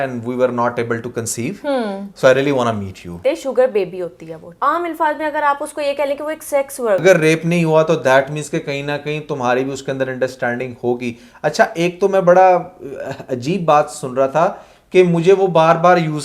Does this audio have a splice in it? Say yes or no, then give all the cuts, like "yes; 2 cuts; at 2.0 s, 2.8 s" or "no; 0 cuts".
yes; 2 cuts; at 3.2 s, 7.0 s